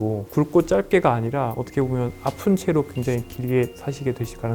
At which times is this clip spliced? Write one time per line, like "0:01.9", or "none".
none